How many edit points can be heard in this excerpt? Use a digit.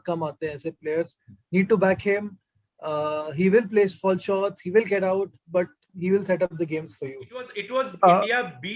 1